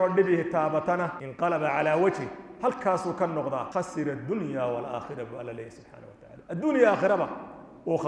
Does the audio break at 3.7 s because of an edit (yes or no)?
yes